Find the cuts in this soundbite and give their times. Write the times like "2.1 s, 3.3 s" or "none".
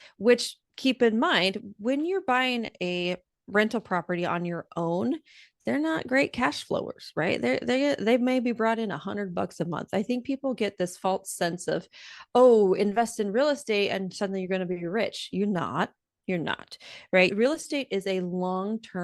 17.3 s